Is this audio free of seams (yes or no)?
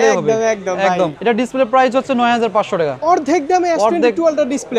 no